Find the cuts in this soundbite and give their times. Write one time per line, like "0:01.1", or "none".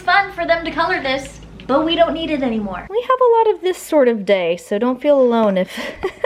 0:02.8

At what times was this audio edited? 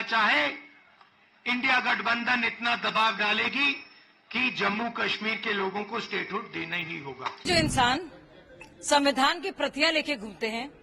0:07.4

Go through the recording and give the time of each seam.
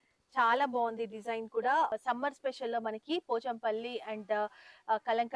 0:02.0

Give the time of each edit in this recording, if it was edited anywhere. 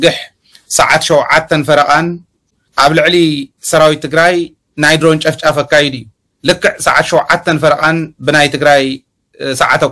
0:02.6

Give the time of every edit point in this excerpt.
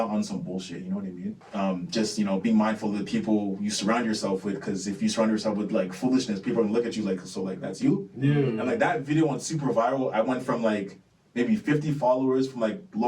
0:01.3

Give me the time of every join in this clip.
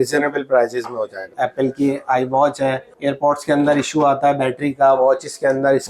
0:01.3
0:02.9

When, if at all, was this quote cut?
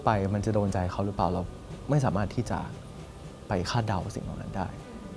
none

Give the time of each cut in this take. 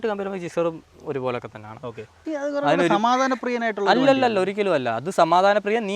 0:02.1

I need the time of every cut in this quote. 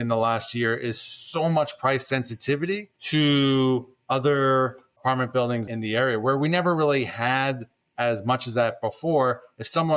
0:05.7

